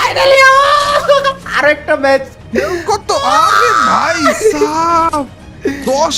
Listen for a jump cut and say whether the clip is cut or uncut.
uncut